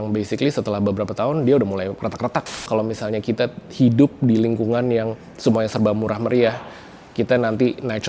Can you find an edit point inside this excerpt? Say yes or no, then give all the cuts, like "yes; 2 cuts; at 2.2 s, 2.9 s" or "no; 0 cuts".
yes; 1 cut; at 2.7 s